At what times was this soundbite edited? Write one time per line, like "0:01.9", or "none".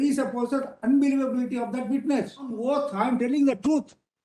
0:02.4